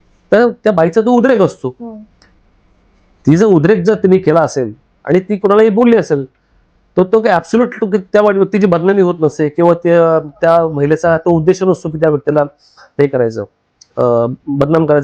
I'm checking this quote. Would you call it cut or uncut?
uncut